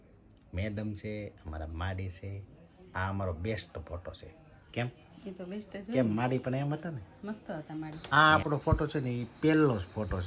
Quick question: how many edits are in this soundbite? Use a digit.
1